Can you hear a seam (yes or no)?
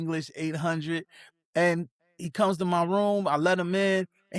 no